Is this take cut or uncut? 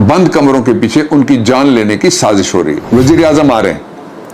cut